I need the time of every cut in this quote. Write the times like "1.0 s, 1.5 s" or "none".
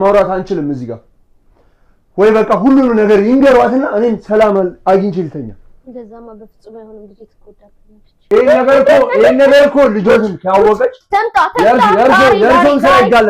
8.3 s